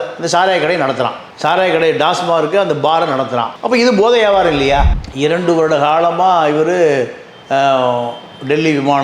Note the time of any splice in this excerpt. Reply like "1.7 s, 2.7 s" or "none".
4.9 s